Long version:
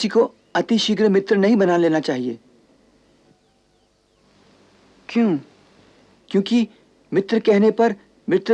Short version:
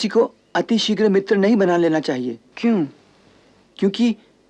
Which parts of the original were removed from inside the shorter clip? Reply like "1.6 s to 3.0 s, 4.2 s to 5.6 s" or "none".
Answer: 2.5 s to 5.0 s